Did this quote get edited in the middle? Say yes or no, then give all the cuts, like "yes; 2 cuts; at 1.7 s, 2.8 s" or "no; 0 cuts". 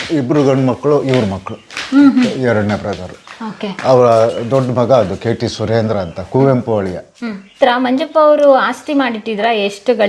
yes; 1 cut; at 7.5 s